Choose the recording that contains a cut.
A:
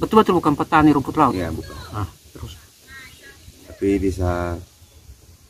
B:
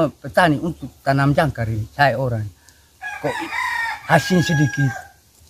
A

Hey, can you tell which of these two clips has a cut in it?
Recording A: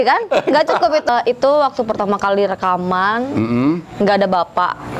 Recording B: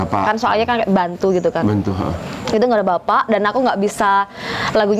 A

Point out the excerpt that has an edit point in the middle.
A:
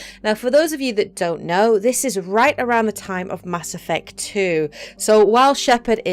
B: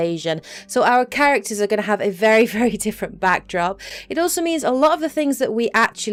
A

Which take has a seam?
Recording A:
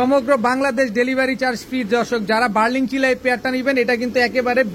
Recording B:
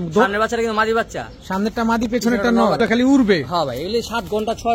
B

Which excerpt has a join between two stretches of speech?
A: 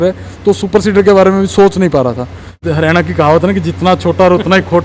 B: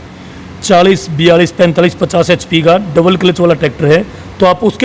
A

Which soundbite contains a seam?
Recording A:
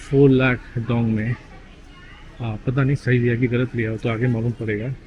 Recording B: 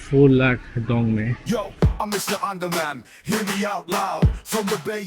B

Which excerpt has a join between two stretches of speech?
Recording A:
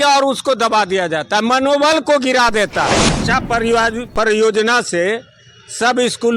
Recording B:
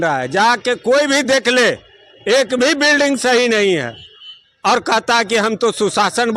A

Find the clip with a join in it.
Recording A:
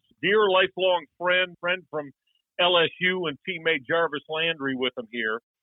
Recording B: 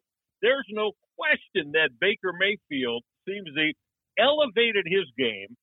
A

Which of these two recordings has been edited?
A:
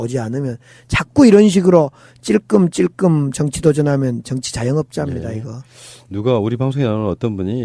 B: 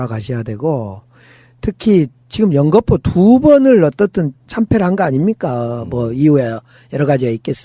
B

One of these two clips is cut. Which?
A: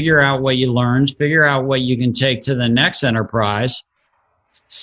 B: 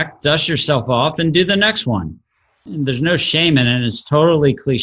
B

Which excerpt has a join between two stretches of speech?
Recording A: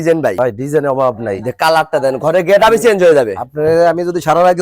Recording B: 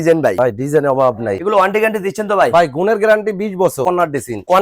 B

